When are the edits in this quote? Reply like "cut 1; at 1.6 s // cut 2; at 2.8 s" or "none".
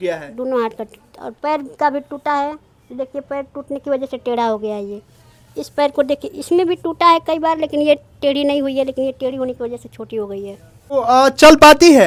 none